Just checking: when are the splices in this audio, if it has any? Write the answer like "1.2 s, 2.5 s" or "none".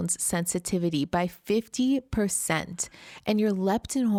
none